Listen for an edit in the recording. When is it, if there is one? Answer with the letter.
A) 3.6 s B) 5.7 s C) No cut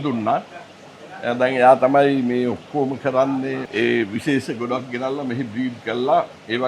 A